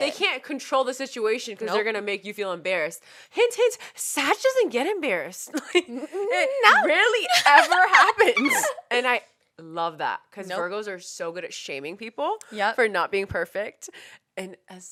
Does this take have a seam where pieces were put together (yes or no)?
no